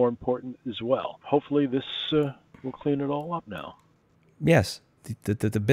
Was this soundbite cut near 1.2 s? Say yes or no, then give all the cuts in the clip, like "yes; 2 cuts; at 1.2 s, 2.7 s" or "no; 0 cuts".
yes; 1 cut; at 1.2 s